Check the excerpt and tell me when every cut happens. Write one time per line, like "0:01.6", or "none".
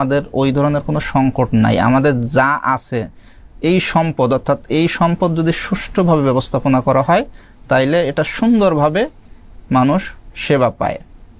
none